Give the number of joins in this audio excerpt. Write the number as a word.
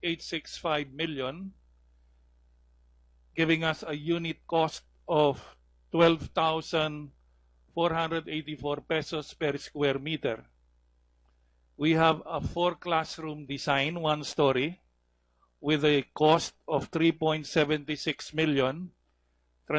one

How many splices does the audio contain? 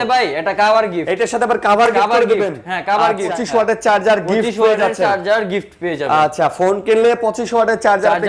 one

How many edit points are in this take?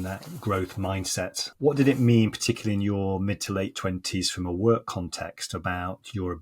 one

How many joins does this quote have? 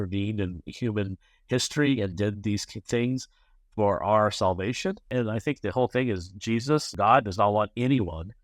two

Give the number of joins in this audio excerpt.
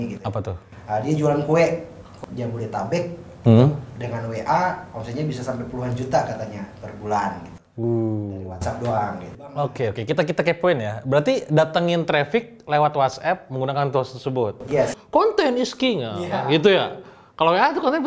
two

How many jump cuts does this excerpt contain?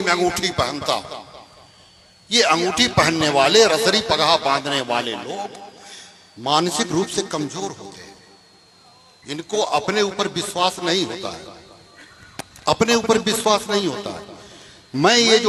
zero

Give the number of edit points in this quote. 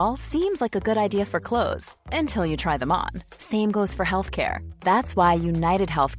zero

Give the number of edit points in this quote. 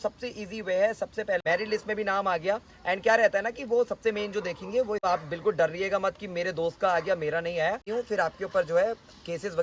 three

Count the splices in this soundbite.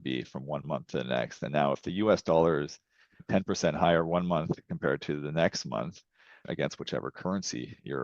two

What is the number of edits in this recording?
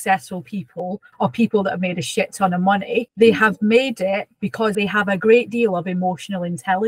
three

